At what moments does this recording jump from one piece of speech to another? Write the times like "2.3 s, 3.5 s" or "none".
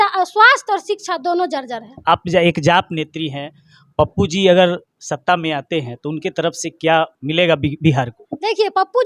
none